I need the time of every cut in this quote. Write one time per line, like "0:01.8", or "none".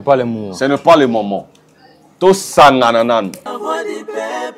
0:03.4